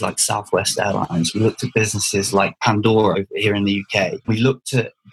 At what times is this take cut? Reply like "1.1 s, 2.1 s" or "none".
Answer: 3.1 s